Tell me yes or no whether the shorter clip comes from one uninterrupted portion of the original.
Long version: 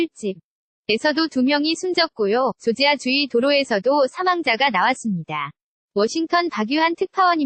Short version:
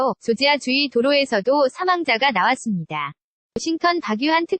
no